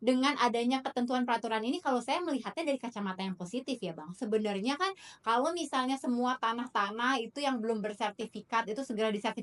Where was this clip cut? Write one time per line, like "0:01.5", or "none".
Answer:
none